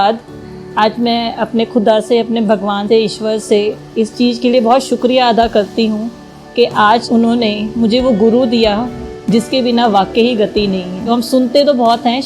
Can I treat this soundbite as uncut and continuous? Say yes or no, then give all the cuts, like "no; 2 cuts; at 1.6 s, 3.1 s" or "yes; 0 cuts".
no; 1 cut; at 11.1 s